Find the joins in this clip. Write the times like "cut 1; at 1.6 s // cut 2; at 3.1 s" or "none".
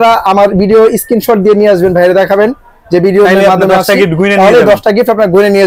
none